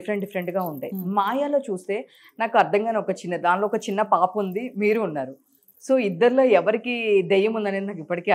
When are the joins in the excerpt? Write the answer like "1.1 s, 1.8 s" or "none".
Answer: none